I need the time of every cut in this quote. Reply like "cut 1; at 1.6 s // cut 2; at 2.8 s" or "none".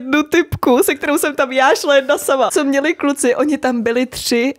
cut 1; at 2.5 s

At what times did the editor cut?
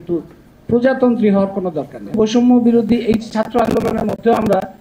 cut 1; at 2.2 s

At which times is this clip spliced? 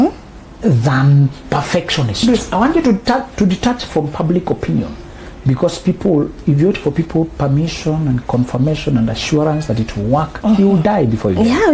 cut 1; at 2.2 s

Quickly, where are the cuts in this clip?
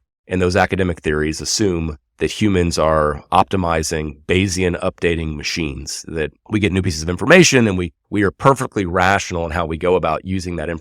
cut 1; at 2.0 s // cut 2; at 6.4 s // cut 3; at 8.0 s

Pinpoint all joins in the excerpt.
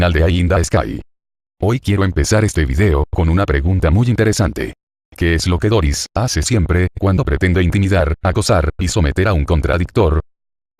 none

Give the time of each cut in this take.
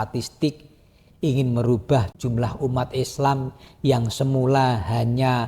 cut 1; at 2.1 s

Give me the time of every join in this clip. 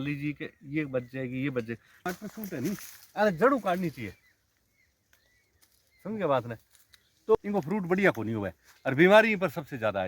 cut 1; at 2.0 s // cut 2; at 7.3 s

